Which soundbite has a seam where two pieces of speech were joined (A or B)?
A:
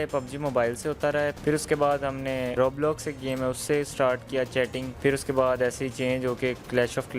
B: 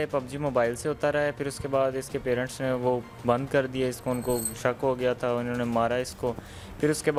A